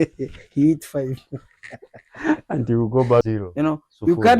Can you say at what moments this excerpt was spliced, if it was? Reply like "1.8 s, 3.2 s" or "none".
3.3 s